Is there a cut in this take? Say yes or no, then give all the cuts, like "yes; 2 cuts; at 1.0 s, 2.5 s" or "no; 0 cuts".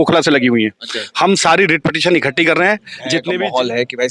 yes; 1 cut; at 3.0 s